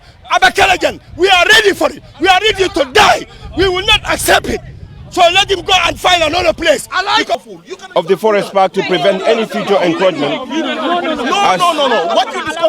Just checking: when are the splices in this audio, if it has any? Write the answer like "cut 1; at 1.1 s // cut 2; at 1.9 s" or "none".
cut 1; at 7.4 s